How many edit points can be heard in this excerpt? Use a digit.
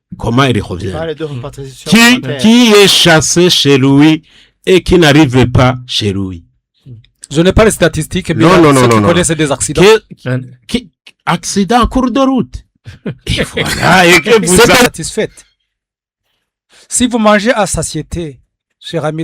1